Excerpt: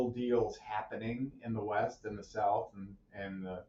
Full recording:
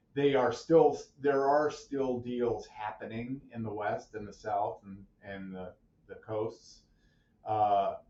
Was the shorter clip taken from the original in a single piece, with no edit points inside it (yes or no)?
yes